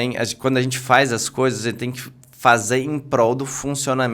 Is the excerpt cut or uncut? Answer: uncut